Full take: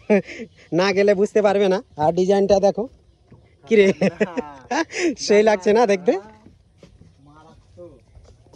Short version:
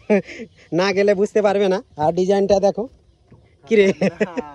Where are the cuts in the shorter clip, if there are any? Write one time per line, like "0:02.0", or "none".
none